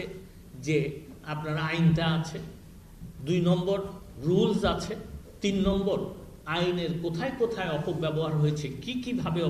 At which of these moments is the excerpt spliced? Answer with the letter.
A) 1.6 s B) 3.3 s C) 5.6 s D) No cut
D